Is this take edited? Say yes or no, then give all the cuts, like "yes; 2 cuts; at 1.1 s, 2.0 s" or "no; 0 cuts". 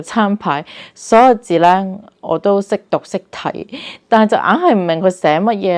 no; 0 cuts